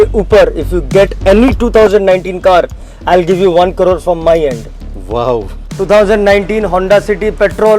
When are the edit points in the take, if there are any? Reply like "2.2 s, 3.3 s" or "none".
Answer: 5.6 s